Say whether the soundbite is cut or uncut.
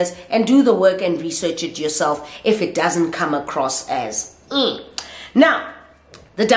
uncut